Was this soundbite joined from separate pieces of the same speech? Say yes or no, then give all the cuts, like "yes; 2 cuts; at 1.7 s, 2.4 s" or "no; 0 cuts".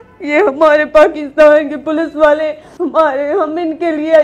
yes; 1 cut; at 2.7 s